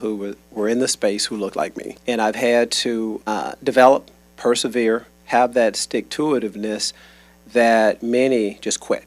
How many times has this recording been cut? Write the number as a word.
two